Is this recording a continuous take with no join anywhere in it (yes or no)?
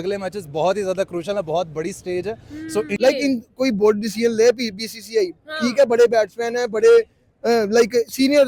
no